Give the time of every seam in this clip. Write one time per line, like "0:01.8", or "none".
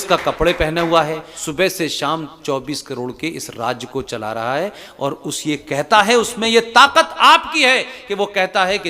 0:01.3